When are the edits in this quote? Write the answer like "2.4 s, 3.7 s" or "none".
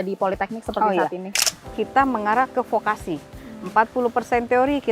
1.4 s